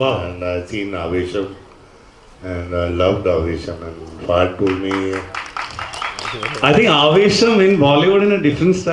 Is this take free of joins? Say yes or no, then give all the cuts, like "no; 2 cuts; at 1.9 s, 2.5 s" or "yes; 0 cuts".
yes; 0 cuts